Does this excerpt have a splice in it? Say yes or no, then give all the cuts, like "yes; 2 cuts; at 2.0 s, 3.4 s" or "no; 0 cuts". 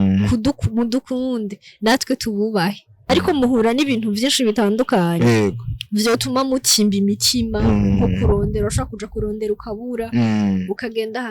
yes; 1 cut; at 3.1 s